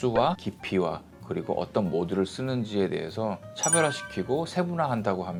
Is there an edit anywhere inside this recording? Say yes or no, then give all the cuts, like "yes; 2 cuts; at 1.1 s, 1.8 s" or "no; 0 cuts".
no; 0 cuts